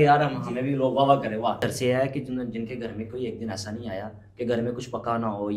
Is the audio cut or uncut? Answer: cut